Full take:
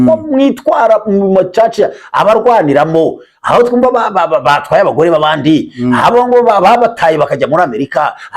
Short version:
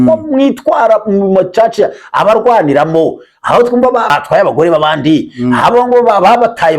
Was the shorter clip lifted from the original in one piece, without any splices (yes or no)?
no